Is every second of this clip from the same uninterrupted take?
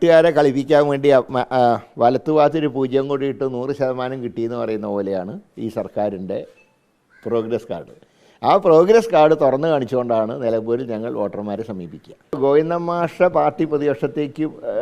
no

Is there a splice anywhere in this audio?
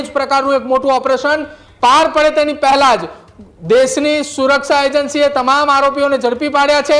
no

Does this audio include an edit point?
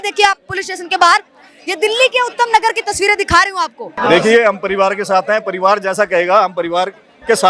no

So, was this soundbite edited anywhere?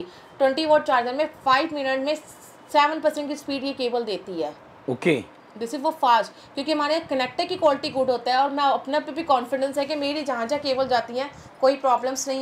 no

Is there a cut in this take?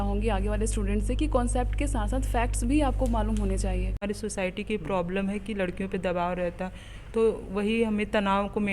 yes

